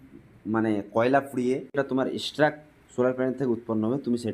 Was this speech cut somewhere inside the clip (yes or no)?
yes